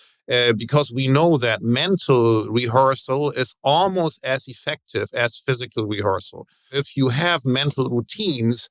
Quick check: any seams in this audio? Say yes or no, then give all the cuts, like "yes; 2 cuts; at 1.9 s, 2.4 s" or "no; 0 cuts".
yes; 1 cut; at 6.8 s